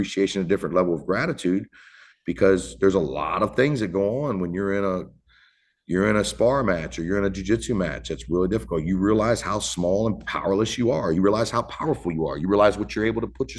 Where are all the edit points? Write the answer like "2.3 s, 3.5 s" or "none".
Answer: none